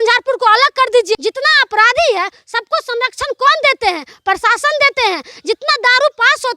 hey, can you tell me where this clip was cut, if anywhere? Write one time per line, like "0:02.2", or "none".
0:01.2